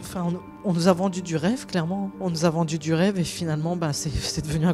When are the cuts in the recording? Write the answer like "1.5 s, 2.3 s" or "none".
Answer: none